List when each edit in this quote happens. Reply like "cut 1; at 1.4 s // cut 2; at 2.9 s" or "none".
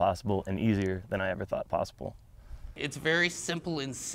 cut 1; at 2.8 s